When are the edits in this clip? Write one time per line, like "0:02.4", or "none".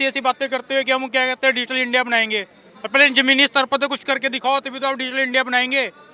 none